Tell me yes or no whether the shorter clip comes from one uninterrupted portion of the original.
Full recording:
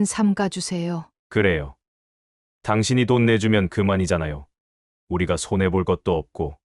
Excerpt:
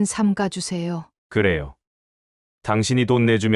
yes